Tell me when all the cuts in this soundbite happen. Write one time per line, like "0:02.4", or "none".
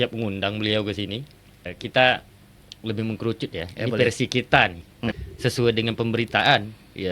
0:01.7
0:05.2